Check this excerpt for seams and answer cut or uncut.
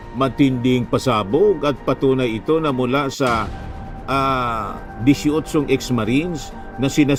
uncut